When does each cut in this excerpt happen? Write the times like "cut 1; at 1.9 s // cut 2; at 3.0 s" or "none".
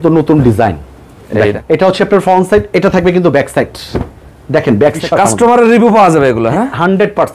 cut 1; at 1.6 s // cut 2; at 5.0 s